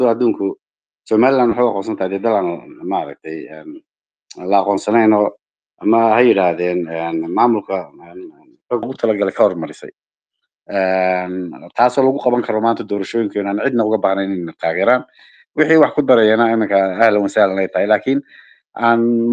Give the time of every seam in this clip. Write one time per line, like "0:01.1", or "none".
0:08.8